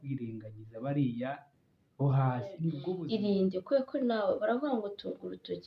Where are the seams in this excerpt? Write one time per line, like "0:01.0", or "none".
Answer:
0:02.9